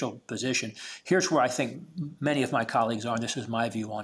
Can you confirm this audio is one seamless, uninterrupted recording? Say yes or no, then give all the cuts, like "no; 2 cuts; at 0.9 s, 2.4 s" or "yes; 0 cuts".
yes; 0 cuts